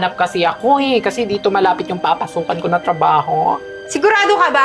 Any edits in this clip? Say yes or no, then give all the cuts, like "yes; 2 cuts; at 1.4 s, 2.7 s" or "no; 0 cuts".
no; 0 cuts